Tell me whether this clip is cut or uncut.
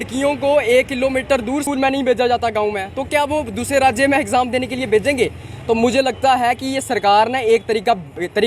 cut